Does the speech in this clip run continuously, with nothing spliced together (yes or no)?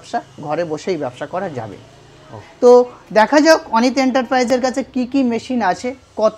yes